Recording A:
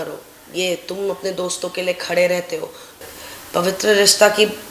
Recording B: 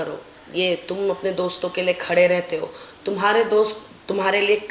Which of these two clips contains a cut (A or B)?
A